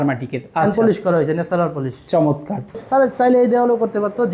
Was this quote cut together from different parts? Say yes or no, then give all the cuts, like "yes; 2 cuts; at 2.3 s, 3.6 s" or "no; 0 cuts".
yes; 1 cut; at 2.8 s